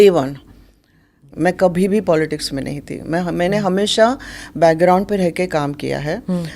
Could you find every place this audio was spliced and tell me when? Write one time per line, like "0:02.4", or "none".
0:01.2